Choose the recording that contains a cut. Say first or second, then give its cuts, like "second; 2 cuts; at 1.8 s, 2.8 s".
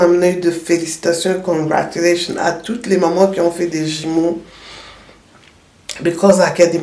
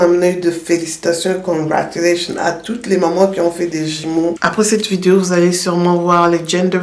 second; 1 cut; at 4.4 s